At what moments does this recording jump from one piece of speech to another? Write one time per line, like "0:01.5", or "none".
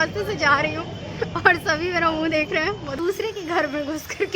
0:03.0